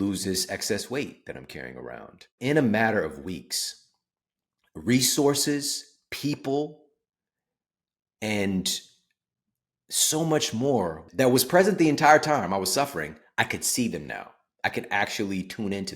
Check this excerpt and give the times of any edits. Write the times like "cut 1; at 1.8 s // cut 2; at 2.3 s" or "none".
cut 1; at 2.4 s // cut 2; at 11.0 s